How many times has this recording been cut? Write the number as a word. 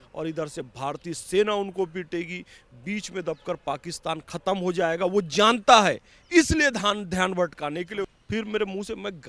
one